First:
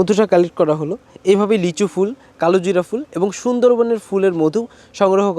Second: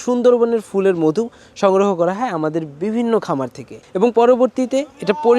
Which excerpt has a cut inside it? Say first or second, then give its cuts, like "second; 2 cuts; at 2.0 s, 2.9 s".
second; 1 cut; at 3.7 s